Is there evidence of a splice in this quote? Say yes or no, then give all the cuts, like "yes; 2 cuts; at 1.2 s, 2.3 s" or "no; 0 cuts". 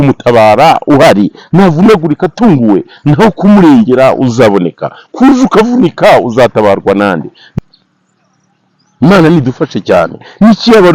yes; 1 cut; at 7.4 s